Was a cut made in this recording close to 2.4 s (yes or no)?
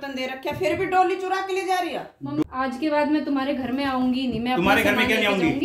yes